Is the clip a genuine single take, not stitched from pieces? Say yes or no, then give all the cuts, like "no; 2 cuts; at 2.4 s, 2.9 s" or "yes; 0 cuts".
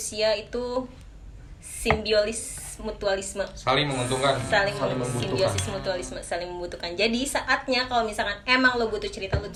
yes; 0 cuts